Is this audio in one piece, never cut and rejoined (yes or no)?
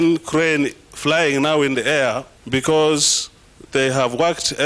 no